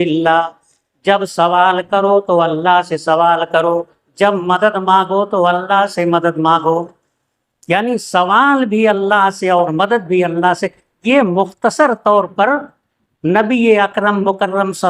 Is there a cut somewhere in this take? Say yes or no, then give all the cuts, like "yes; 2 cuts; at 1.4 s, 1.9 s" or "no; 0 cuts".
no; 0 cuts